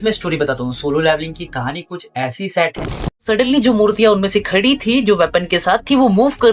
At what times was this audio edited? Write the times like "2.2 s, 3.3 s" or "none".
3.2 s